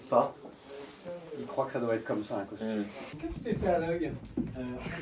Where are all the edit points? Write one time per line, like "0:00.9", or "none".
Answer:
0:03.0

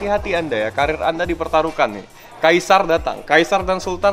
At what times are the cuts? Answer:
none

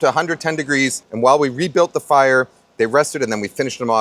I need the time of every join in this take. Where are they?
0:01.0

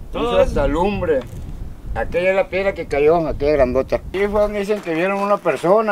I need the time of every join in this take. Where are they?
0:04.1

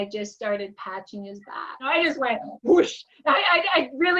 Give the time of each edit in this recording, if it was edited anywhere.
0:01.9

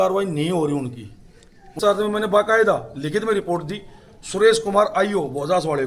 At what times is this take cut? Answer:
0:01.8

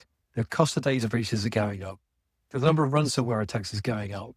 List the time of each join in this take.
0:02.4

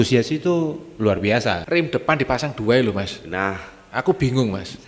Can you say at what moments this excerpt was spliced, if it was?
0:01.6

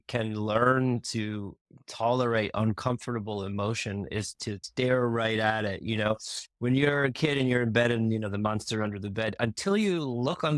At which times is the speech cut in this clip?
0:04.6

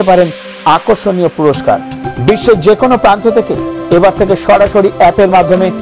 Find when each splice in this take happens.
0:02.0

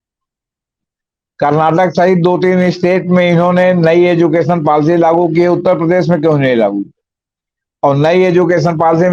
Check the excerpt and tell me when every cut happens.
none

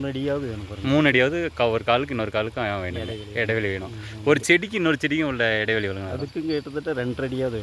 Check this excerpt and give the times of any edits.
none

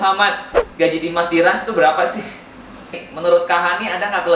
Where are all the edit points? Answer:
0:03.0

